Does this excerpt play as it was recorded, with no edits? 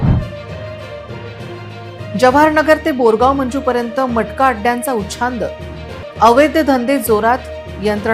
yes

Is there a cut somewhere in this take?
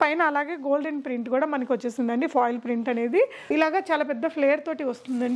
yes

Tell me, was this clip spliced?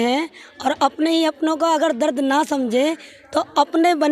no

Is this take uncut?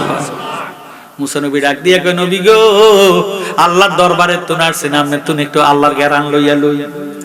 yes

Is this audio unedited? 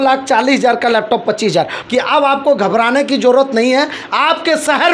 no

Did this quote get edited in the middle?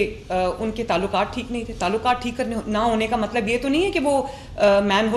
no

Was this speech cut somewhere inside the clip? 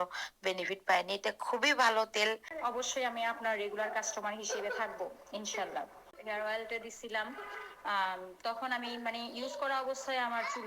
yes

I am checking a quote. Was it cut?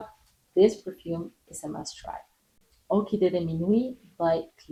no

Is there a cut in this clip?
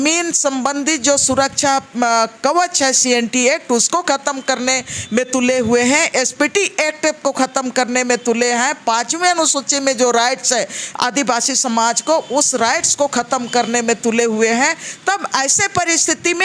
no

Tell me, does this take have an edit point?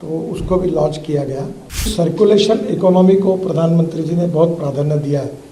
yes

